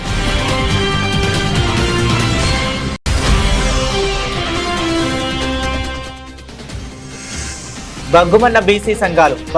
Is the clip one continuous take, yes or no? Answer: yes